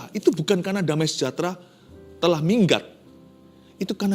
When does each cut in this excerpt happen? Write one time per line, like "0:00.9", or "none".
0:01.3